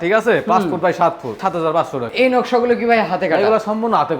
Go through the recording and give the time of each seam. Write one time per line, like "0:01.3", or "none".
0:01.5

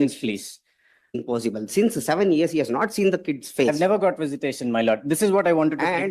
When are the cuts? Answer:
0:01.2

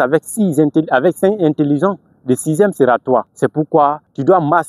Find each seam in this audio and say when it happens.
0:03.7

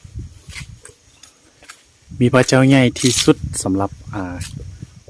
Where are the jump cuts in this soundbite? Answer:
none

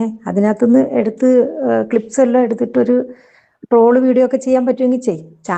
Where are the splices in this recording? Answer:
none

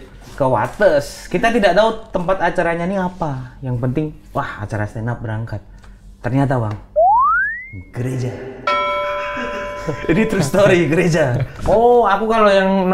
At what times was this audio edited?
0:11.5

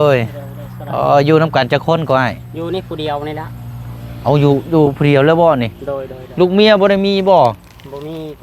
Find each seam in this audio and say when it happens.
none

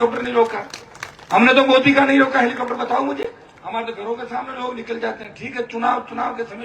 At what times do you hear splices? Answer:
none

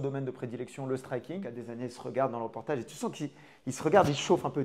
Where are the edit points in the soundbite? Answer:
0:01.6

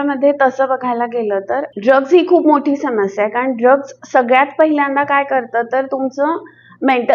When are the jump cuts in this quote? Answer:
0:01.7

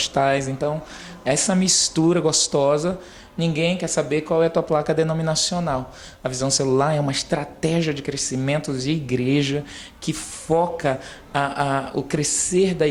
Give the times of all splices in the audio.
none

